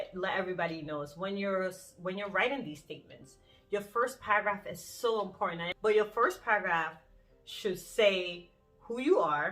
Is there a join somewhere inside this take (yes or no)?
yes